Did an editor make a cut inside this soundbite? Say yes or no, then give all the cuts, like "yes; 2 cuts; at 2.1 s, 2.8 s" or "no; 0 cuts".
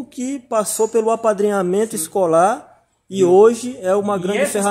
no; 0 cuts